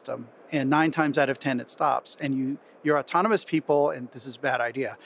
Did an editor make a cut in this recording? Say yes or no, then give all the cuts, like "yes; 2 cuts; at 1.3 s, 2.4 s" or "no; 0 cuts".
no; 0 cuts